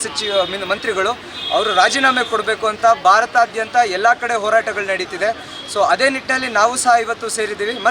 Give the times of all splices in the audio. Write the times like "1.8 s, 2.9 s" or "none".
none